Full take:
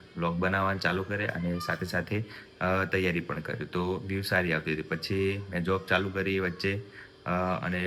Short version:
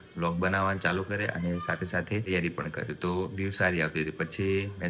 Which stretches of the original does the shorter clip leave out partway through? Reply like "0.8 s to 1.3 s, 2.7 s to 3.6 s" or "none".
2.3 s to 3.0 s